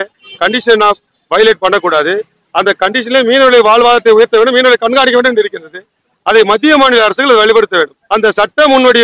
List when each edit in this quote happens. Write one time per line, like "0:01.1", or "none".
0:08.0